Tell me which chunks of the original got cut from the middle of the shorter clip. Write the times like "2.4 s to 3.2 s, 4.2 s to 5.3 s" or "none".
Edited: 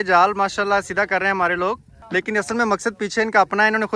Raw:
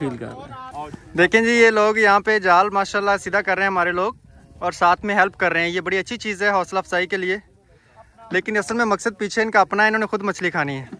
4.3 s to 8.1 s

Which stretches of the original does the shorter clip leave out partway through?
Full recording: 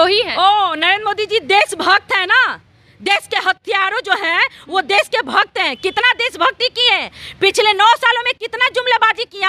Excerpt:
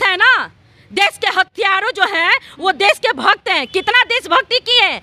none

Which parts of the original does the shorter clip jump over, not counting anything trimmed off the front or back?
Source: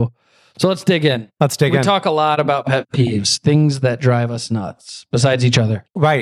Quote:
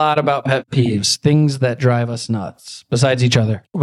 none

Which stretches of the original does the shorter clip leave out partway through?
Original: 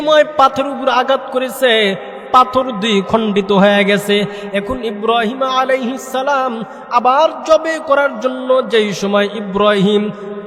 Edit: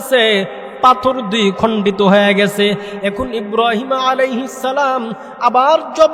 none

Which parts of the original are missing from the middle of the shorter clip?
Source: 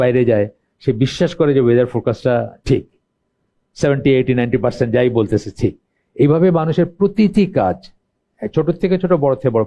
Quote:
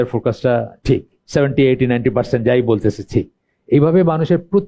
3.0 s to 3.6 s

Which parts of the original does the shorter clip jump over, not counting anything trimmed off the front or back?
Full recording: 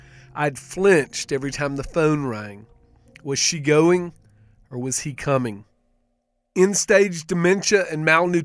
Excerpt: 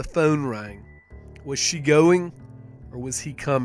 none

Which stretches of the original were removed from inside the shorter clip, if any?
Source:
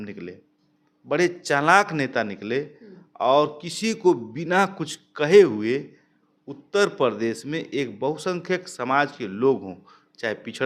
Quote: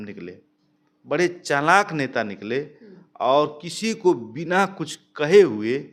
none

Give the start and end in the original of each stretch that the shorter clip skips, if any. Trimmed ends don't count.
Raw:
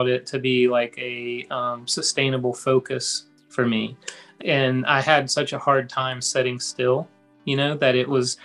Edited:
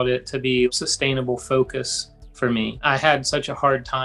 0.7 s to 1.9 s, 4.0 s to 4.8 s

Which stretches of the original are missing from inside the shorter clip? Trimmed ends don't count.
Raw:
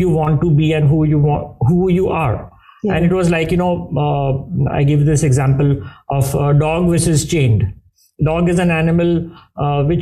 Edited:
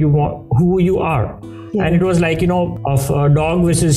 3.8 s to 6.0 s

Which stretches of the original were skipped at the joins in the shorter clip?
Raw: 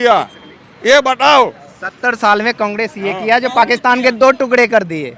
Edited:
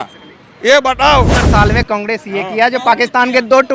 1.6 s to 2.1 s

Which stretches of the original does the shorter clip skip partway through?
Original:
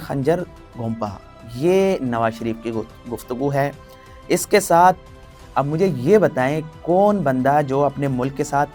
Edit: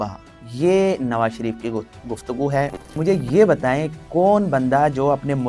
4.0 s to 5.7 s

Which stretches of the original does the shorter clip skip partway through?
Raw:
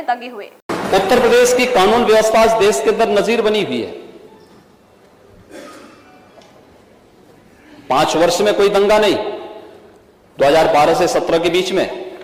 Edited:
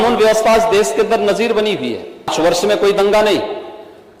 4.2 s to 8.1 s

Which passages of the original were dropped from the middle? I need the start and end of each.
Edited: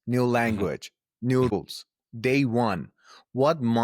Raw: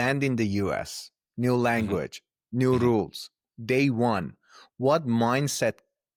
2.8 s to 3.0 s

